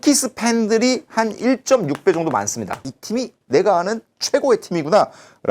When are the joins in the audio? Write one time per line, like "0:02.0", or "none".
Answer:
0:02.9